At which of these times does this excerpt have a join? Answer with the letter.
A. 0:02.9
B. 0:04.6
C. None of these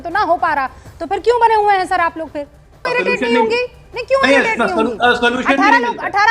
A